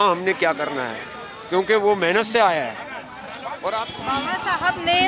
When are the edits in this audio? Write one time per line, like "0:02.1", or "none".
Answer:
0:03.8